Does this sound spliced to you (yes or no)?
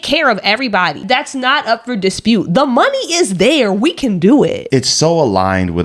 yes